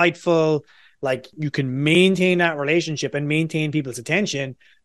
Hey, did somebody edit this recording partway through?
yes; 1 cut; at 1.3 s

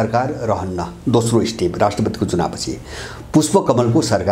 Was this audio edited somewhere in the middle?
no; 0 cuts

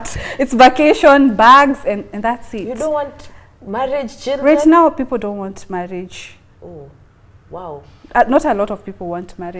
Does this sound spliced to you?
no; 0 cuts

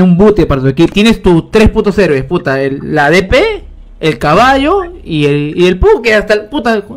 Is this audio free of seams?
no; 1 cut; at 0.9 s

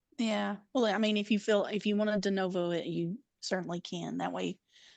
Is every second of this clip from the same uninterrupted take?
yes; 0 cuts

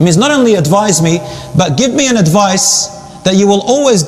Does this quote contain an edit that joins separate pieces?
no; 0 cuts

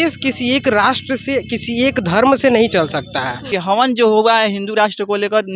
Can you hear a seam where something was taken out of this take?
yes; 1 cut; at 3.5 s

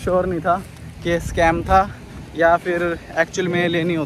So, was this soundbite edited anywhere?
no; 0 cuts

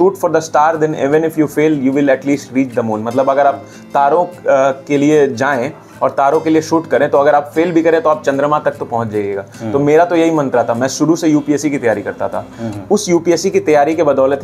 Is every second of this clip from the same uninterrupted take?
yes; 0 cuts

